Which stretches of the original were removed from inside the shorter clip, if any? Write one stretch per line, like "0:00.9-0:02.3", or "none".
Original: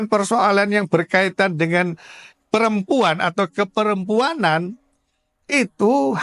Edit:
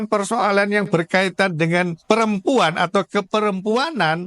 0:01.9-0:02.4